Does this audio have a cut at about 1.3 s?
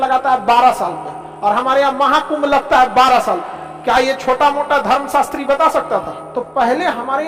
no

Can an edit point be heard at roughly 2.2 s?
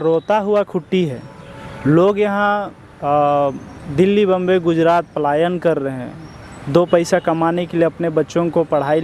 no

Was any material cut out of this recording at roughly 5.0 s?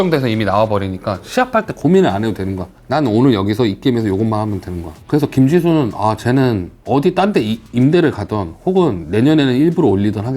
no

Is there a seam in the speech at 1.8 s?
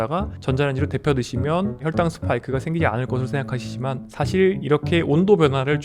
yes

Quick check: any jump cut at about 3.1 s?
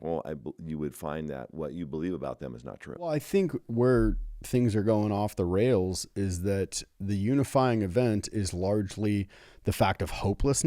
yes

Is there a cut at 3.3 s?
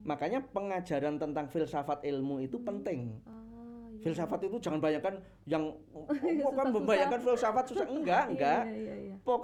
no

